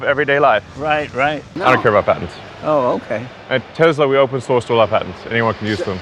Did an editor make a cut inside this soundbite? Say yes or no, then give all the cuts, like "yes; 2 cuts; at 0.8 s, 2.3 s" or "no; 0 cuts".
yes; 1 cut; at 1.5 s